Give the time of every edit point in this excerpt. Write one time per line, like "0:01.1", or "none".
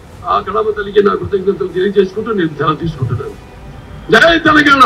none